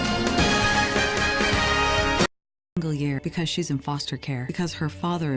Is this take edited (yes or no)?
yes